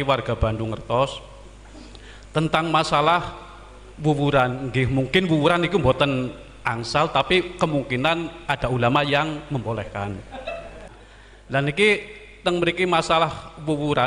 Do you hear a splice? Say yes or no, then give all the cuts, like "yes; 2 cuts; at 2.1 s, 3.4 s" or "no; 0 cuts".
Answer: yes; 1 cut; at 10.8 s